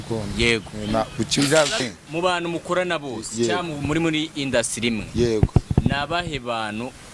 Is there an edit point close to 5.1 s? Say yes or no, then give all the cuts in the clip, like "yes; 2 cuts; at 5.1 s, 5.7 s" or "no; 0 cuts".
no; 1 cut; at 1.8 s